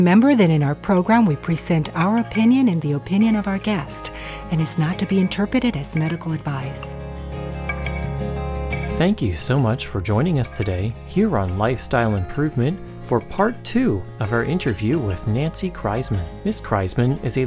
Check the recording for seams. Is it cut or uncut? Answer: cut